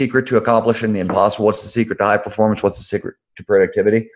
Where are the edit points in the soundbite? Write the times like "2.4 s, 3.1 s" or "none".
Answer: none